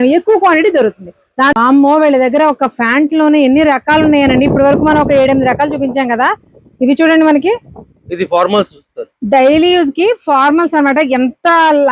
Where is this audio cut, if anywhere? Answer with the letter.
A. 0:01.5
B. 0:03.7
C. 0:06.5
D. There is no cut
A